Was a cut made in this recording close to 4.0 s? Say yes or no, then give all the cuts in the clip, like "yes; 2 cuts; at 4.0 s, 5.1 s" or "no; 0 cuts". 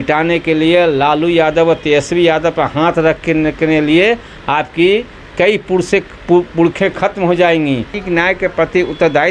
no; 1 cut; at 8.0 s